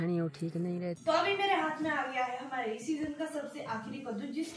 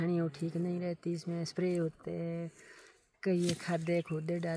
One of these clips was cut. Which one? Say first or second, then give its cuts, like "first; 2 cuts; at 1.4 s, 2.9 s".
first; 1 cut; at 1.0 s